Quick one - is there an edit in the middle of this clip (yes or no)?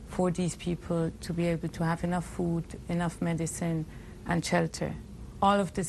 no